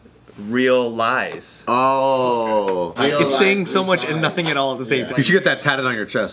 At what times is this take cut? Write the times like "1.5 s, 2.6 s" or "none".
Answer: 2.9 s, 5.1 s